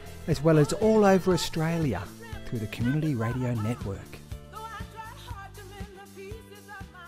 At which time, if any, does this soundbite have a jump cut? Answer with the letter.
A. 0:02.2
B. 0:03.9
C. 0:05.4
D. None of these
B